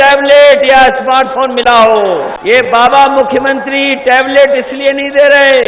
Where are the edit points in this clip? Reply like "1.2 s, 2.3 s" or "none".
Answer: 2.3 s